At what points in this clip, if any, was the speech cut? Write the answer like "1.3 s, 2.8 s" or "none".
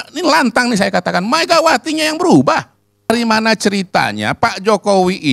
3.1 s